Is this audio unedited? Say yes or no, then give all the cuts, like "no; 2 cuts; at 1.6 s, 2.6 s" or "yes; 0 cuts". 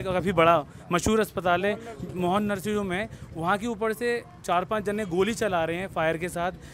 yes; 0 cuts